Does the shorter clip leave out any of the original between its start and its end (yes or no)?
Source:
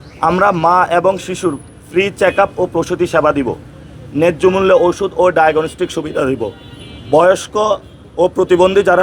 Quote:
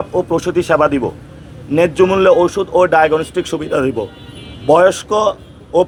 no